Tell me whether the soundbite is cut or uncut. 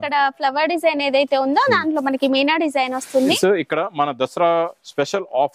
cut